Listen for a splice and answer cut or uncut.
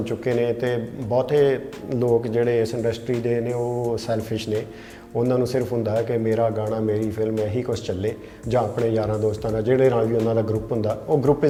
uncut